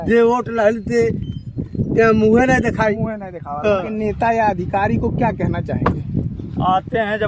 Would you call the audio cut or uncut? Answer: cut